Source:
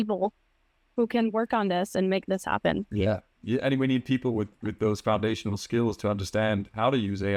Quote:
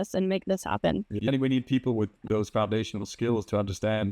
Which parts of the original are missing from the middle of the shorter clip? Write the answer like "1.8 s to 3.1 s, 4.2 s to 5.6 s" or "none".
3.0 s to 3.6 s, 4.6 s to 4.7 s